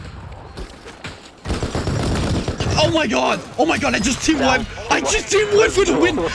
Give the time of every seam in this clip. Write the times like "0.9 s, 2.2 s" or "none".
none

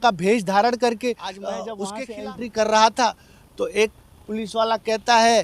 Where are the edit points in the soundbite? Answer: 1.8 s

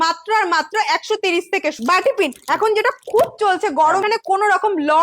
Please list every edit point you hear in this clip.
1.8 s, 4.0 s

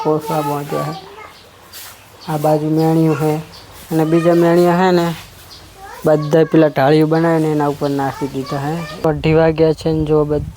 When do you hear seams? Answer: 8.9 s

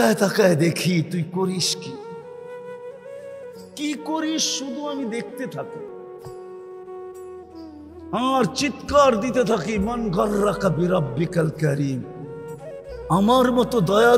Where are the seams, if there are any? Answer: 1.6 s, 3.3 s

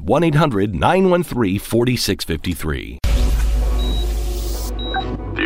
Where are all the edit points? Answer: 3.0 s

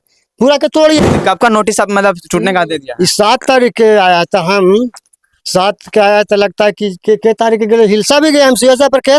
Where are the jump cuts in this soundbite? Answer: 1.0 s

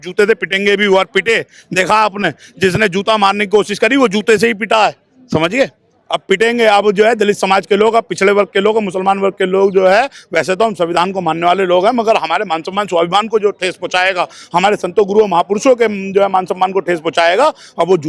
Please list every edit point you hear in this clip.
none

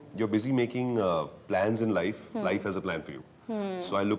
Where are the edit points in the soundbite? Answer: none

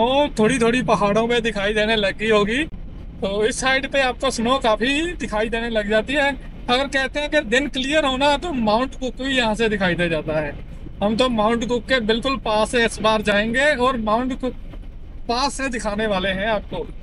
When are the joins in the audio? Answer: none

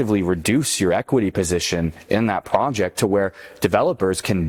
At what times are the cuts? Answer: none

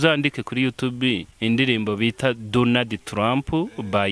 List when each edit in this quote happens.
1.3 s

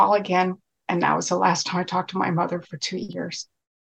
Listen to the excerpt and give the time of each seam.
none

